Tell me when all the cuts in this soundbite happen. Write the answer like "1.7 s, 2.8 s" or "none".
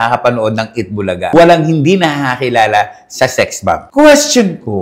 none